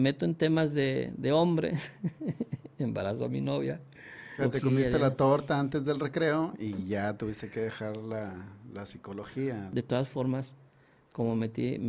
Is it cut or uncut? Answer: cut